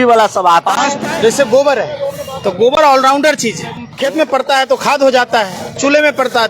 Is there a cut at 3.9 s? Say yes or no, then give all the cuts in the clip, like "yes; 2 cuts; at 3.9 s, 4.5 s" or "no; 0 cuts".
yes; 2 cuts; at 1.0 s, 3.9 s